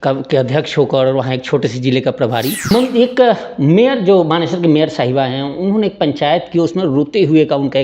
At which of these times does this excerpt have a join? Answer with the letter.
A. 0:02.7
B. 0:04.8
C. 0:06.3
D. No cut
A